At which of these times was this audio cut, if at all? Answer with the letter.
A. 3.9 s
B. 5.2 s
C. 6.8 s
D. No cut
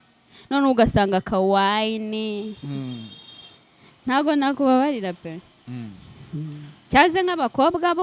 D